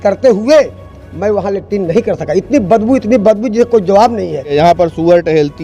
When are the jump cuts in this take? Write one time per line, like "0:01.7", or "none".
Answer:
0:04.5